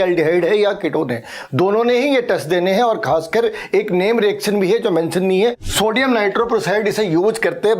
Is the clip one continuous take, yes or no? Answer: no